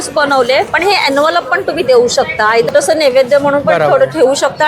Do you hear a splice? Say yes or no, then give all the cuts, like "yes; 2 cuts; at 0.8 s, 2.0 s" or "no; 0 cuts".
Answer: yes; 1 cut; at 2.7 s